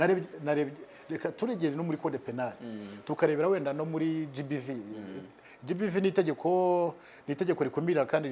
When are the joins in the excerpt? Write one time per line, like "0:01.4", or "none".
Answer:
none